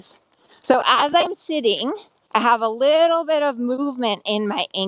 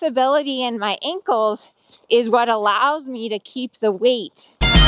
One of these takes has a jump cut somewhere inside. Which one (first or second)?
first